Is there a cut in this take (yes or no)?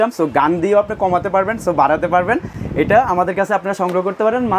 no